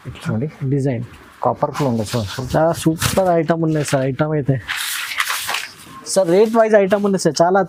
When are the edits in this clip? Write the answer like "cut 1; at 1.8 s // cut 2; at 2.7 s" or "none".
none